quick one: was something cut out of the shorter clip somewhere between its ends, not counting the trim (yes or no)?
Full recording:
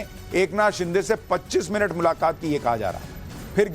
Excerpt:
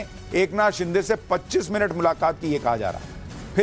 no